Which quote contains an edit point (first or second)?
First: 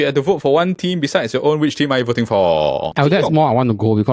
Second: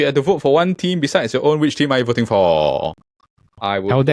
first